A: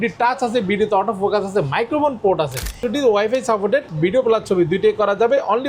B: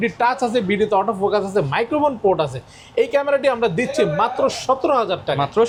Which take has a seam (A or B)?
A